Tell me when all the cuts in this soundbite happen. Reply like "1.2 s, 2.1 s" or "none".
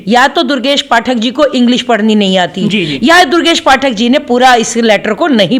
none